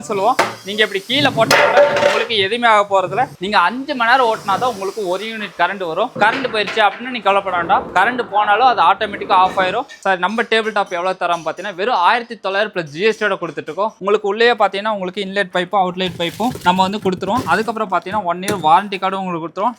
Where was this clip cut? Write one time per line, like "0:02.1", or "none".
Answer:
0:03.4
0:06.1
0:09.9
0:14.0